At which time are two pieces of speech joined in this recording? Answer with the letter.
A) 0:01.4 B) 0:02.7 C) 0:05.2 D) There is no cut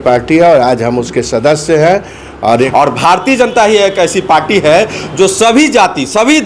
B